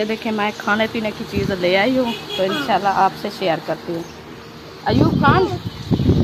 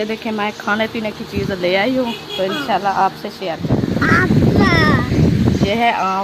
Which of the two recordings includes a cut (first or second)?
second